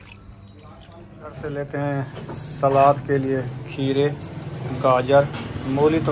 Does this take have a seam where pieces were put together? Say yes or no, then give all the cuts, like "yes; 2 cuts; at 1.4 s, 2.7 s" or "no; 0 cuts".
yes; 1 cut; at 1.4 s